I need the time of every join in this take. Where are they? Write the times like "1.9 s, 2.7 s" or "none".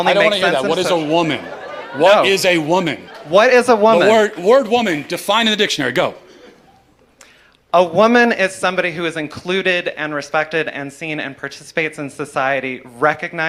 none

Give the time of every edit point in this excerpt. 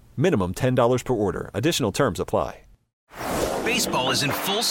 2.8 s

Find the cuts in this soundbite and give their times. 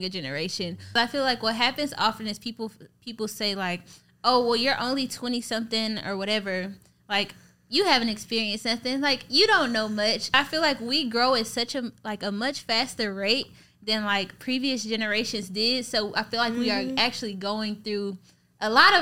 0.9 s, 10.3 s

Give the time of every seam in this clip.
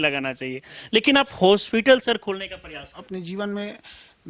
3.0 s

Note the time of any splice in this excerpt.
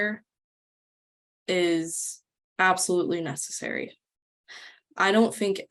none

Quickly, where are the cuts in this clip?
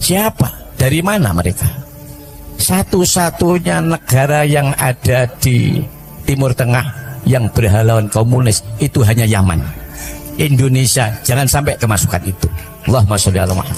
none

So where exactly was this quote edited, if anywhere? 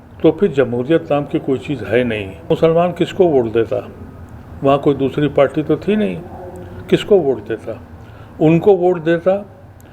2.5 s

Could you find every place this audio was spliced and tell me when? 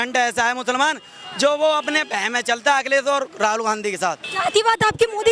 4.3 s

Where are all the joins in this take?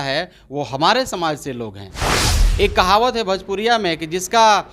2.2 s

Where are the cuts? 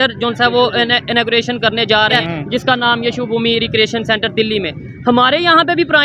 2.1 s

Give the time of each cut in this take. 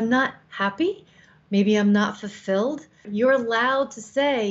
3.0 s

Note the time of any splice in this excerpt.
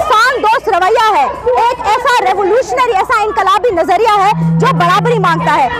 none

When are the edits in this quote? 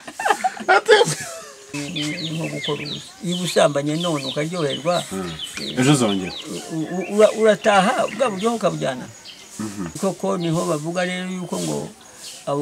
1.7 s, 10.0 s

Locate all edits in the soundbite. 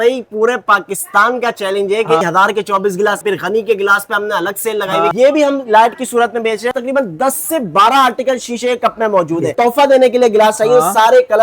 2.2 s, 3.2 s, 5.1 s, 6.7 s, 9.5 s

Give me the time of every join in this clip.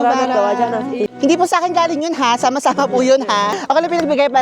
1.1 s, 3.6 s

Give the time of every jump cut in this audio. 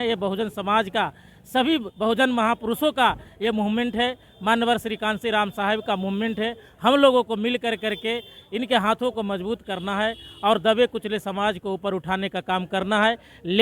none

